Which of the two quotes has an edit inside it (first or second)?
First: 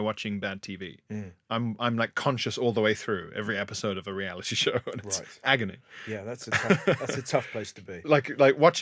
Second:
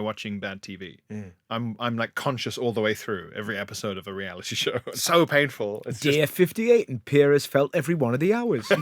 second